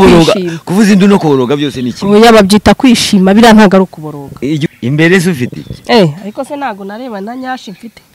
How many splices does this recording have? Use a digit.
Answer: 1